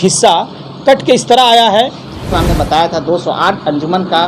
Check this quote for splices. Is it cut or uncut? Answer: cut